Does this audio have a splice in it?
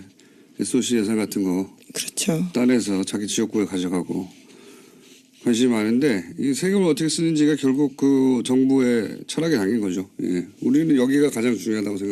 yes; 1 cut; at 6.7 s

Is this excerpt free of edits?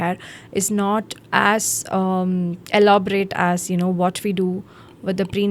yes; 0 cuts

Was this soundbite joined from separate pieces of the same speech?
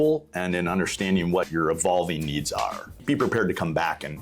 yes; 2 cuts; at 1.5 s, 3.0 s

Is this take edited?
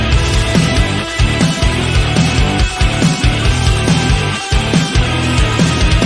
yes; 1 cut; at 1.8 s

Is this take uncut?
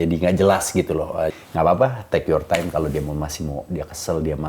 no; 1 cut; at 1.3 s

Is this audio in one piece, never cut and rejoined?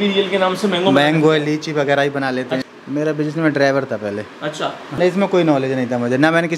no; 2 cuts; at 2.8 s, 5.0 s

